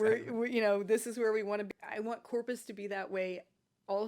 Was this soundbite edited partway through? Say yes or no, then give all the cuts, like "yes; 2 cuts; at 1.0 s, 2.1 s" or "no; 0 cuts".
yes; 1 cut; at 1.7 s